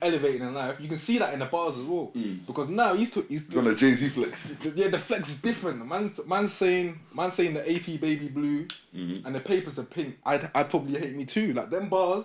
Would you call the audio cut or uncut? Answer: uncut